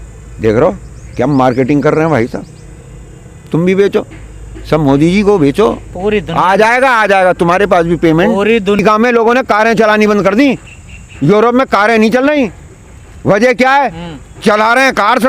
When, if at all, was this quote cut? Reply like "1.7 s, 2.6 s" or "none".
8.8 s